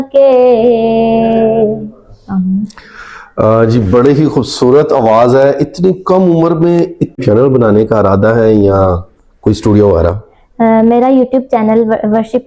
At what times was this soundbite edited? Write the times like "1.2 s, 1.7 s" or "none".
7.2 s